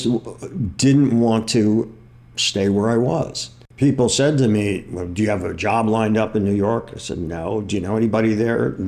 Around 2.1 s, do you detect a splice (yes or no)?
no